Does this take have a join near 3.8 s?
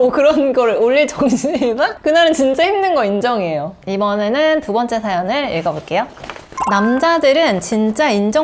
no; 0 cuts

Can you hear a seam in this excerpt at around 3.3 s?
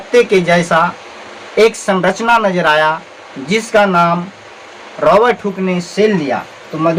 no; 0 cuts

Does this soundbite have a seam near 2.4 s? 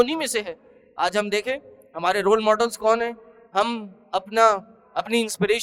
no; 0 cuts

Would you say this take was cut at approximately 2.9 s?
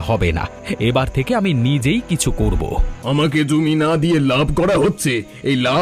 yes; 1 cut; at 2.9 s

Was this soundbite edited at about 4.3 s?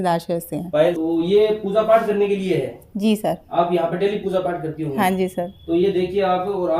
no; 1 cut; at 1.0 s

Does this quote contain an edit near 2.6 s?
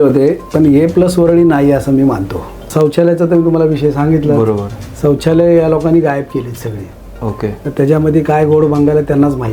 yes; 1 cut; at 2.6 s

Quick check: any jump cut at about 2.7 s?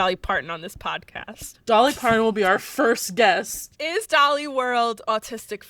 no; 1 cut; at 4.0 s

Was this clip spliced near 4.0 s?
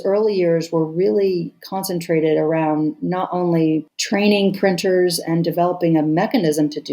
yes; 1 cut; at 4.0 s

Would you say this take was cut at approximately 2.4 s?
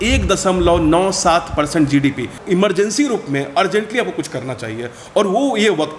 yes; 1 cut; at 2.4 s

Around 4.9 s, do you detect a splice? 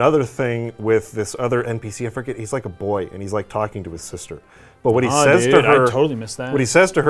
no; 0 cuts

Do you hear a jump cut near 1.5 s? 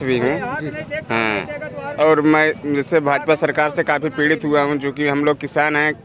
no; 0 cuts

